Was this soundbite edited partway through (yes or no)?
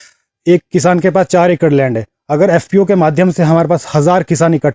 no